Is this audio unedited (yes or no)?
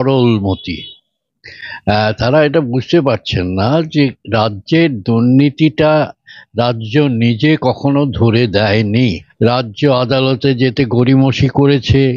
no